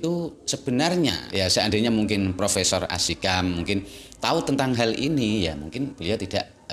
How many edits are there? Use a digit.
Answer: 1